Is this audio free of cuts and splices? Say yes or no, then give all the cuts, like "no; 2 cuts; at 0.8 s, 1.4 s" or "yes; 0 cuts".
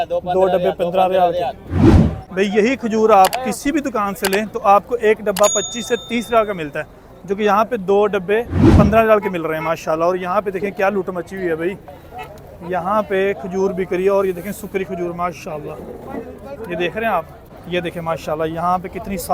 yes; 0 cuts